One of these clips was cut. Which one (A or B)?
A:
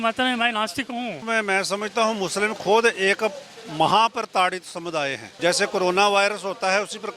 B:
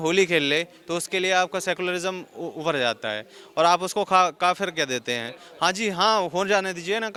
A